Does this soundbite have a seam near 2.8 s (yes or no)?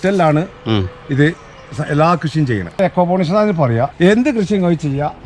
yes